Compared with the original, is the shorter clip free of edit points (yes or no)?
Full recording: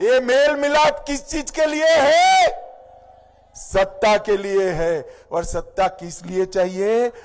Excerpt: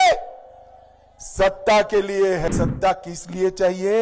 no